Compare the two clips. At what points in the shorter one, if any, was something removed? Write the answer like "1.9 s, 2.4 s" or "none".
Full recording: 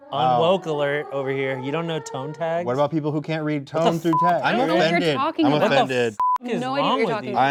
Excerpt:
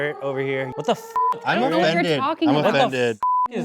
0.9 s